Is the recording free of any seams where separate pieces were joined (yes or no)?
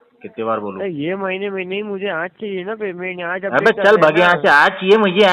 yes